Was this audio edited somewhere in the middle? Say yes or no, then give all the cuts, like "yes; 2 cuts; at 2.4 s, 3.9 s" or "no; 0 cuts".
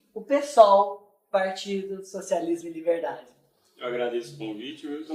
no; 0 cuts